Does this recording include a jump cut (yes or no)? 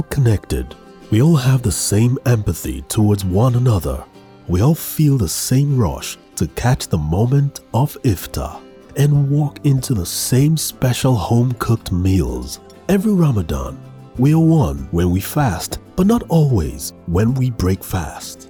no